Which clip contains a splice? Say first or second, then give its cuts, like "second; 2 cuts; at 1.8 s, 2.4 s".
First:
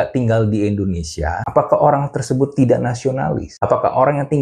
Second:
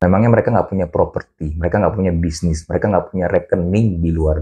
first; 2 cuts; at 1.4 s, 3.5 s